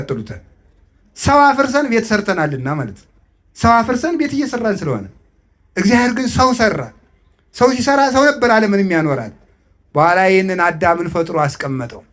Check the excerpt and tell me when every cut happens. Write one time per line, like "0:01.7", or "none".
none